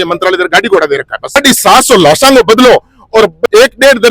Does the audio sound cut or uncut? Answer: cut